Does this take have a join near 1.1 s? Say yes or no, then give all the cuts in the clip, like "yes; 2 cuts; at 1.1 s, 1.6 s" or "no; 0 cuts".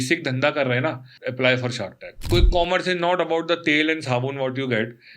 yes; 2 cuts; at 1.1 s, 2.1 s